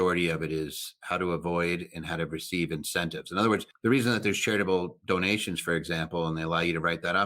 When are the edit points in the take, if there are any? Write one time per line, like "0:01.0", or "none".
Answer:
0:00.9
0:03.7